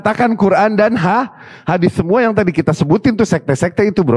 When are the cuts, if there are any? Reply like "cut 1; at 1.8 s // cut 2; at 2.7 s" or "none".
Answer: none